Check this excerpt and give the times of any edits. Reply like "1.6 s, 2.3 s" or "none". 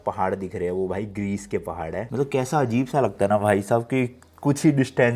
none